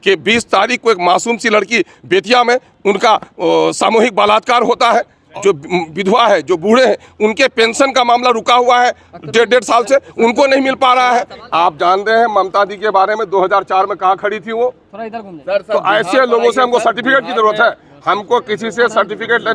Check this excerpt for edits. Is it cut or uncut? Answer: cut